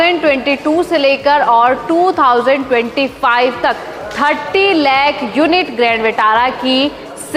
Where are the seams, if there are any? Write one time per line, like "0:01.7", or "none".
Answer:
none

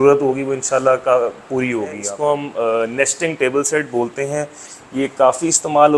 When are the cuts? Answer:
0:02.1

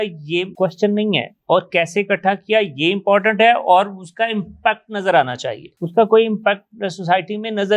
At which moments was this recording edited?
none

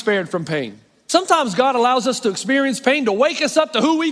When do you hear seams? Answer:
0:00.9

